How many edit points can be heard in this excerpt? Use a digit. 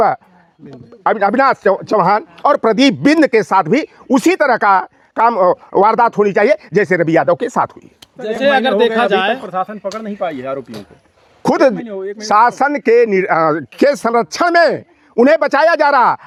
0